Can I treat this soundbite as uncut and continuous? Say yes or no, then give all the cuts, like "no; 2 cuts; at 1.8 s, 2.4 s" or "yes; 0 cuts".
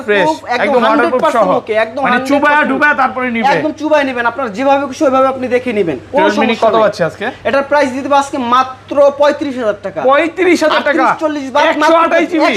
yes; 0 cuts